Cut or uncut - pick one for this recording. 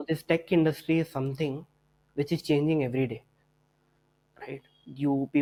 uncut